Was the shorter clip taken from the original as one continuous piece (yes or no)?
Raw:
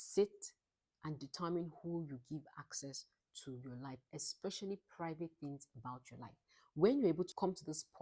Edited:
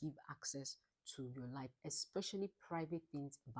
yes